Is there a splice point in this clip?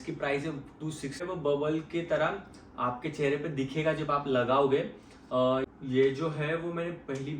yes; 2 cuts; at 1.2 s, 5.7 s

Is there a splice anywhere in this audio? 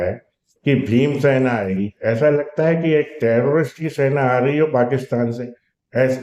no; 0 cuts

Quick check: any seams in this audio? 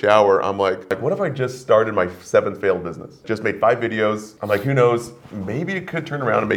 yes; 3 cuts; at 1.0 s, 3.2 s, 4.3 s

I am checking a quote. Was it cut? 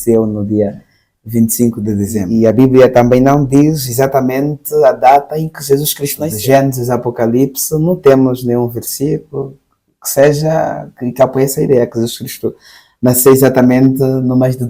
yes; 2 cuts; at 2.3 s, 6.3 s

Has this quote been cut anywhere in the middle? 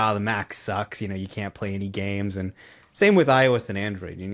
no; 0 cuts

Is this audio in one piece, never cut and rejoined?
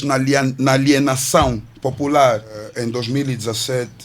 no; 1 cut; at 2.7 s

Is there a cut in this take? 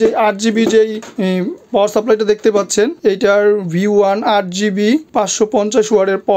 yes; 2 cuts; at 1.1 s, 3.0 s

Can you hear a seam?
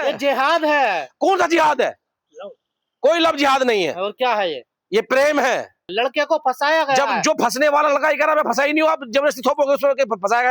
yes; 1 cut; at 5.9 s

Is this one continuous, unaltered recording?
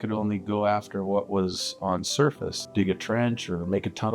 no; 1 cut; at 2.6 s

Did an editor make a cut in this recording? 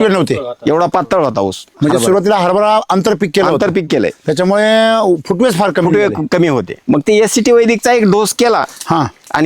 yes; 2 cuts; at 1.7 s, 6.7 s

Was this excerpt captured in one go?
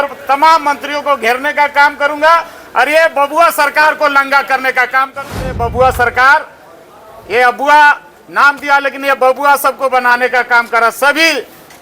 no; 1 cut; at 5.4 s

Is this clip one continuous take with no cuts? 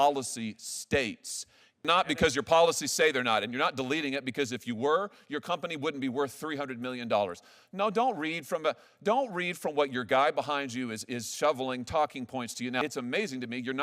no; 2 cuts; at 1.9 s, 12.8 s

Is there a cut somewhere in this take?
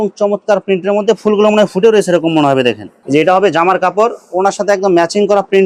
no; 0 cuts

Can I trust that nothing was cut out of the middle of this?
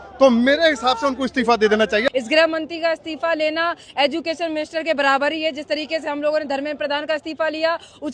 no; 1 cut; at 2.1 s

